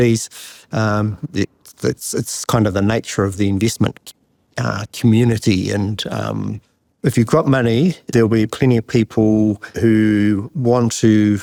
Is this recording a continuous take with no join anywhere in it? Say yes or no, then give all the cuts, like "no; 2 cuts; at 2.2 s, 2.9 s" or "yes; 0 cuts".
yes; 0 cuts